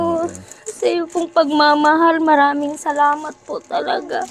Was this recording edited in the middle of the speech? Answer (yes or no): no